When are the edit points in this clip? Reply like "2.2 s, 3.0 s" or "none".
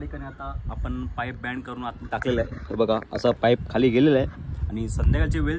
none